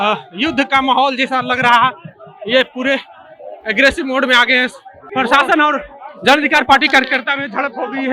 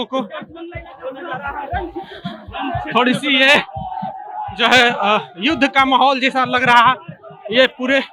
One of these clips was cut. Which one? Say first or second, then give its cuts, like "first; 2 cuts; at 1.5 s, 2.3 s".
first; 1 cut; at 5.1 s